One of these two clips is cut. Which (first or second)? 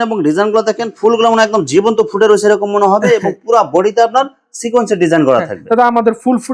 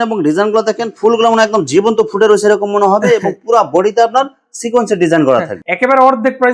second